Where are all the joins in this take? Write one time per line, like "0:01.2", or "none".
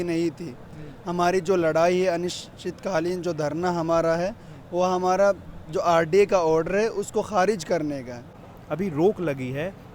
0:08.3